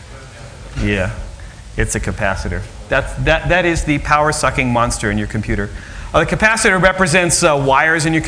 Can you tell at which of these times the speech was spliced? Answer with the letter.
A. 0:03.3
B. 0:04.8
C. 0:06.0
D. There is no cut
D